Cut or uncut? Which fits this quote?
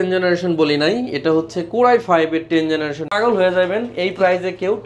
cut